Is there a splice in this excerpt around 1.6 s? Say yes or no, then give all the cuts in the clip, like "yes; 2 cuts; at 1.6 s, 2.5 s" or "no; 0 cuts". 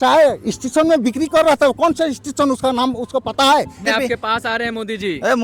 no; 1 cut; at 3.9 s